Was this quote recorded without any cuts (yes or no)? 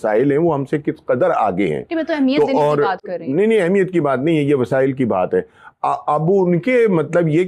yes